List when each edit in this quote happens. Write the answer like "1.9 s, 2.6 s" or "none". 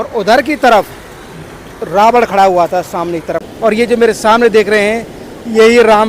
3.5 s